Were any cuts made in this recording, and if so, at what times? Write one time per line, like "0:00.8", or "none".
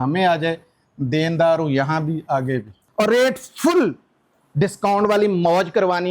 0:02.8